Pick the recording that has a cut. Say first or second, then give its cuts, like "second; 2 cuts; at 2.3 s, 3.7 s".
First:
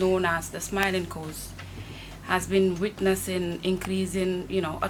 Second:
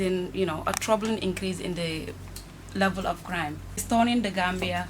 second; 1 cut; at 3.8 s